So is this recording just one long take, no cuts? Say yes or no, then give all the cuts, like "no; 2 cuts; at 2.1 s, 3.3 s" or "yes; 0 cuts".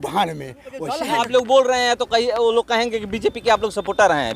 no; 1 cut; at 1.0 s